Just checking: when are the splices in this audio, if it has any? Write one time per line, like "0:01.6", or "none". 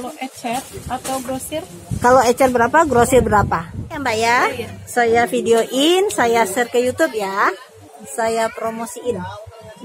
0:03.8